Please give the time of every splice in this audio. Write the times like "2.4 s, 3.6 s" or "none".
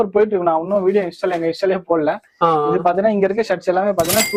none